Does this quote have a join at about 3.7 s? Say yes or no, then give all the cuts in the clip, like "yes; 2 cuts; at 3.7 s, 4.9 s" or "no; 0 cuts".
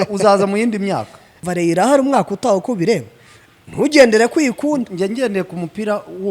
no; 1 cut; at 1.4 s